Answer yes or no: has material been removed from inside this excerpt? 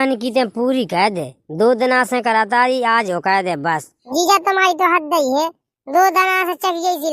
yes